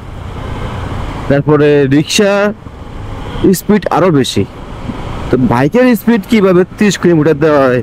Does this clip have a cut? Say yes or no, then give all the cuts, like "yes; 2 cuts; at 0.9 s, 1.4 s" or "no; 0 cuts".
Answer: no; 0 cuts